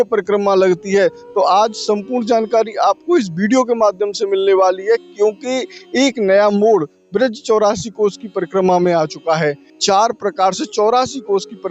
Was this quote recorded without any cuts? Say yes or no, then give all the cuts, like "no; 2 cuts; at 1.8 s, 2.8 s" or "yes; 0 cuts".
no; 1 cut; at 9.7 s